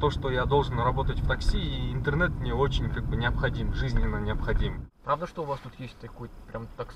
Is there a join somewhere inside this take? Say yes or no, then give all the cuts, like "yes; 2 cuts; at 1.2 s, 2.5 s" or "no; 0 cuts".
yes; 1 cut; at 4.9 s